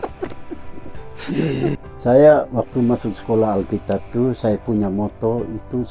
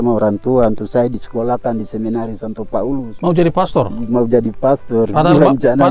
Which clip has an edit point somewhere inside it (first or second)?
first